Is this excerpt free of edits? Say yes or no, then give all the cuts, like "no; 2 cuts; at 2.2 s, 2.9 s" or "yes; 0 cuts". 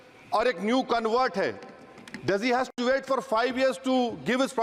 yes; 0 cuts